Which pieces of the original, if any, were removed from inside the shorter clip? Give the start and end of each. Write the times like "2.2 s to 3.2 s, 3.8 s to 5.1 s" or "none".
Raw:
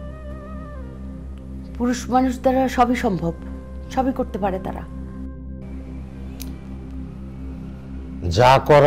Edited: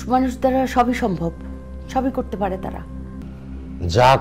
5.3 s to 7.7 s